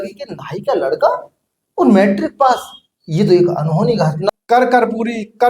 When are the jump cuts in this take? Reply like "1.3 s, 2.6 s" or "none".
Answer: 4.2 s